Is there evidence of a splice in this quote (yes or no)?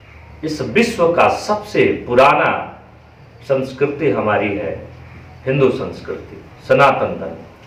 no